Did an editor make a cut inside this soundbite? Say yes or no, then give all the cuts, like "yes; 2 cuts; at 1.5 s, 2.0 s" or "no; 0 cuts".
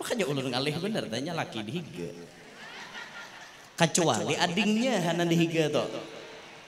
no; 0 cuts